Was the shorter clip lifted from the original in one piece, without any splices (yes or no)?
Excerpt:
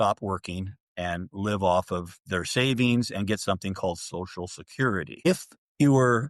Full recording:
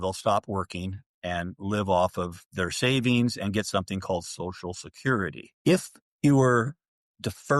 no